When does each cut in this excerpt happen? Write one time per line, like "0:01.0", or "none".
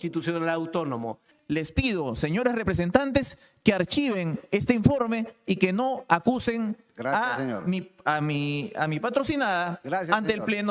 0:01.3